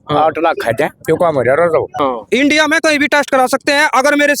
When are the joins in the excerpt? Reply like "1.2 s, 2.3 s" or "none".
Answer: 2.0 s